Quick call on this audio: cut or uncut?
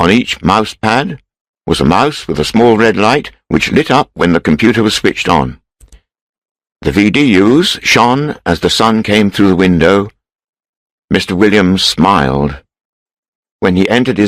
uncut